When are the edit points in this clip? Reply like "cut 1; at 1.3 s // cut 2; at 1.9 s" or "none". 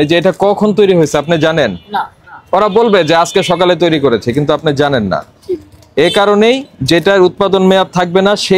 none